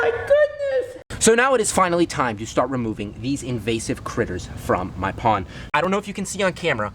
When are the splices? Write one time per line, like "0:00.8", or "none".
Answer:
0:01.0
0:05.8